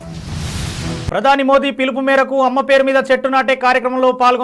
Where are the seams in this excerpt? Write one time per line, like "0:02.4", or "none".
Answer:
0:01.1

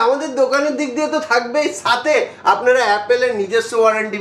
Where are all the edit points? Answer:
none

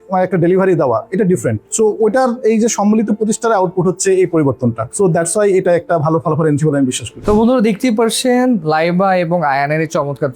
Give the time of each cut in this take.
0:07.1

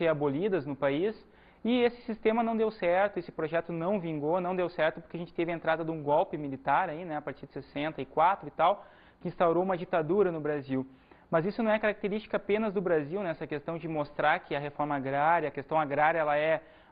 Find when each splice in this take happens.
0:11.4

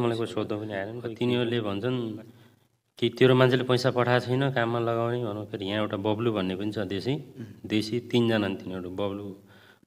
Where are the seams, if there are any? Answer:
0:01.0

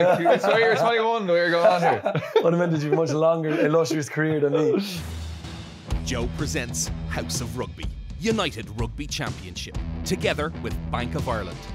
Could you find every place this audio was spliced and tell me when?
0:05.0

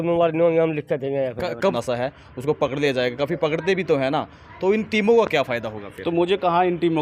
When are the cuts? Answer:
0:01.6

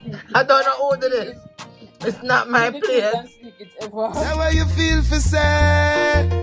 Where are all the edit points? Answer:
0:04.3

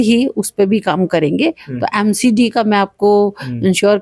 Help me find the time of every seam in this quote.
none

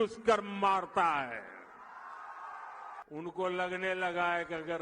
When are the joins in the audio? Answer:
0:03.0

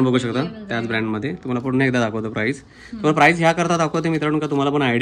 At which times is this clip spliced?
none

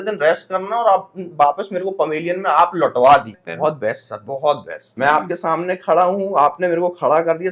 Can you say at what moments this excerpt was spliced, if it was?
0:03.4
0:04.8

